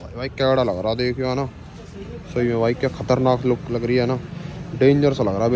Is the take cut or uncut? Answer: uncut